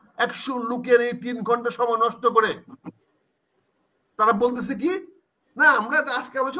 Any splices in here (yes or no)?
no